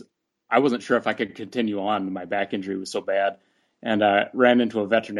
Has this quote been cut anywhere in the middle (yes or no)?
no